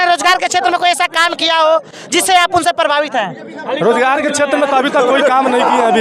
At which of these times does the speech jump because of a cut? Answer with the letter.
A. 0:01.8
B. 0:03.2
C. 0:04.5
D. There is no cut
D